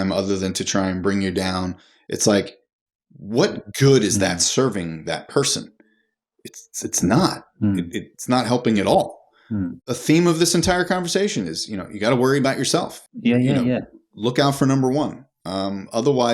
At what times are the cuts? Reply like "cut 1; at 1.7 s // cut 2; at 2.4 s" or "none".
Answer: cut 1; at 9.7 s // cut 2; at 13.0 s